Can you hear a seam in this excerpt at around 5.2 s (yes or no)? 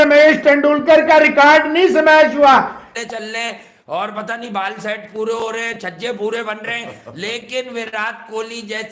no